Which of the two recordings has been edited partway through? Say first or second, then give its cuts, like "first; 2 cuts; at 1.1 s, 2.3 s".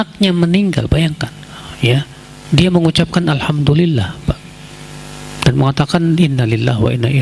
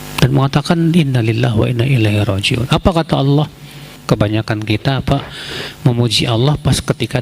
second; 1 cut; at 3.9 s